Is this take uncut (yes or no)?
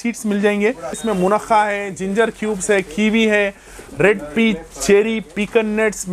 no